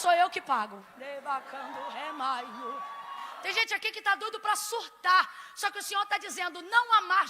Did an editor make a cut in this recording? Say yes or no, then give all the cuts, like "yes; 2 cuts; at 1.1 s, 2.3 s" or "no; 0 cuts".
yes; 1 cut; at 3.4 s